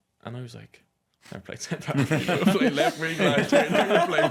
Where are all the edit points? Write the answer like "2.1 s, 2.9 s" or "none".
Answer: none

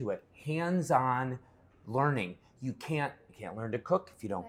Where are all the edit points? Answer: none

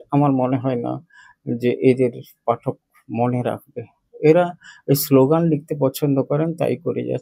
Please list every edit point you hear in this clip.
none

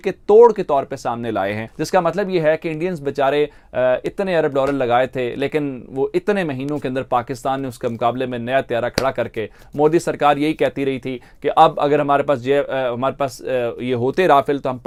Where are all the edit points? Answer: none

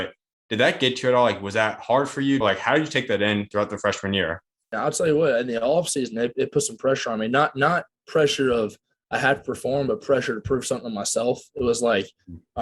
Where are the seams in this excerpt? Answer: 2.4 s, 4.7 s

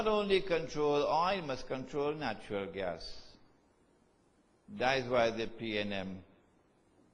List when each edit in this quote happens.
4.9 s

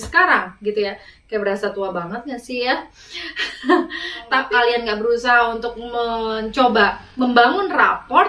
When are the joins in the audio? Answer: 4.4 s

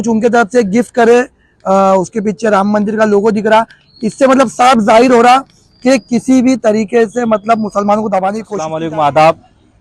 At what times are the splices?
8.7 s

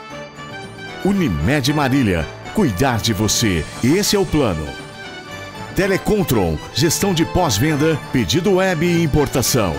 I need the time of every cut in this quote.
1.0 s

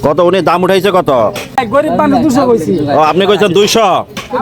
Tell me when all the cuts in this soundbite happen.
1.6 s

